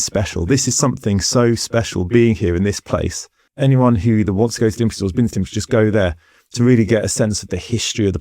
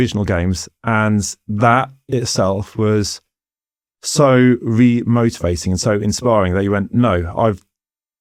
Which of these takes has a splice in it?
first; 1 cut; at 3.4 s

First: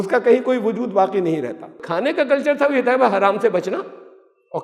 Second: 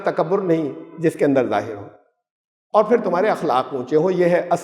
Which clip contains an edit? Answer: first; 1 cut; at 1.8 s

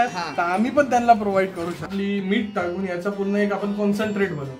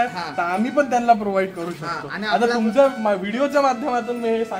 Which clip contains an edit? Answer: first; 1 cut; at 1.9 s

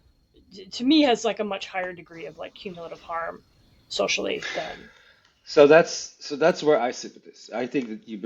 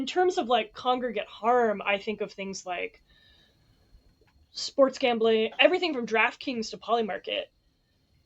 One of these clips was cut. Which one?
second; 1 cut; at 5.6 s

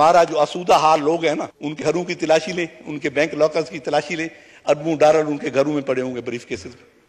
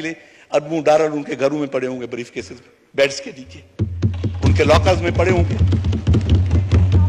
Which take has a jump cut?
first; 1 cut; at 1.8 s

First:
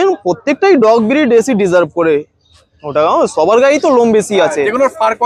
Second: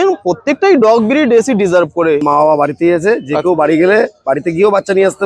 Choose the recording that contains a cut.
second; 1 cut; at 2.2 s

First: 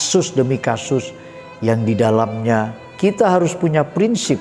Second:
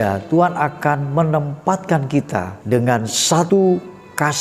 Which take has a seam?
second; 2 cuts; at 2.6 s, 3.5 s

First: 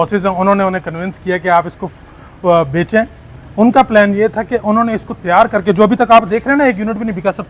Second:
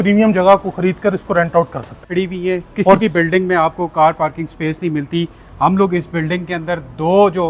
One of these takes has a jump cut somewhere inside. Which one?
second; 1 cut; at 2.1 s

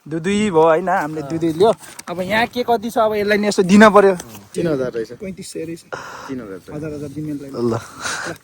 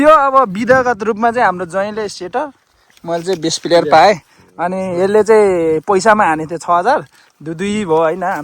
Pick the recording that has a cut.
first; 1 cut; at 4.4 s

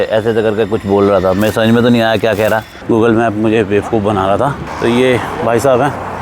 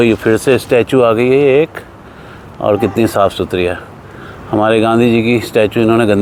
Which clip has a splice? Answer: first; 2 cuts; at 2.7 s, 4.7 s

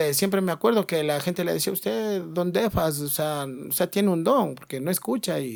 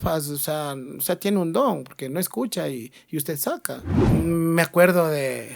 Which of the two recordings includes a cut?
second; 1 cut; at 3.9 s

